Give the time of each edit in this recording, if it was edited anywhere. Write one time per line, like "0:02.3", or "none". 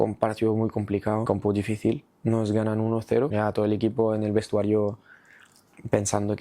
0:01.2
0:03.3